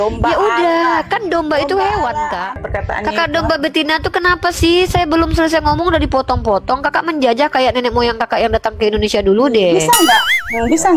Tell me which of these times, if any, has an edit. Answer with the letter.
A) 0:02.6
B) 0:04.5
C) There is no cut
A